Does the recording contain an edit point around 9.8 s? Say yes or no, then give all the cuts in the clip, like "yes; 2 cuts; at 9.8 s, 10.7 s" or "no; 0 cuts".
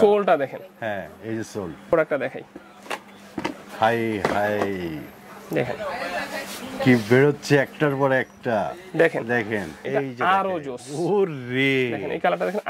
yes; 2 cuts; at 1.9 s, 9.8 s